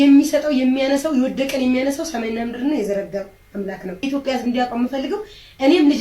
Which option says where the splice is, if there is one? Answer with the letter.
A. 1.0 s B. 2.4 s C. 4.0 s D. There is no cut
C